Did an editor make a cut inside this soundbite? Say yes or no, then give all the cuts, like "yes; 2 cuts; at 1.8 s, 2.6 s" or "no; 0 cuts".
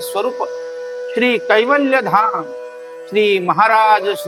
no; 0 cuts